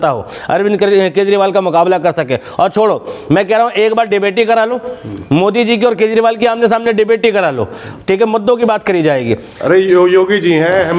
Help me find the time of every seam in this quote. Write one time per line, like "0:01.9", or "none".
none